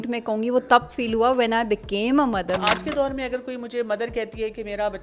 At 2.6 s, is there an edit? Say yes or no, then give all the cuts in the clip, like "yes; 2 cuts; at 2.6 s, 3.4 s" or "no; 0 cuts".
yes; 1 cut; at 2.6 s